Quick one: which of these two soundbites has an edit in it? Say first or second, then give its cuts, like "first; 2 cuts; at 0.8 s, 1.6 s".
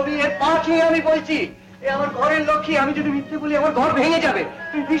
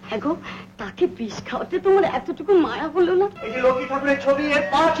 second; 1 cut; at 3.3 s